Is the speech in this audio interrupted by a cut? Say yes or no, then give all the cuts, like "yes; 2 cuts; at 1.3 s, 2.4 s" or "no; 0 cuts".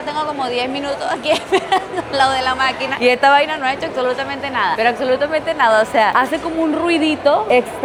no; 0 cuts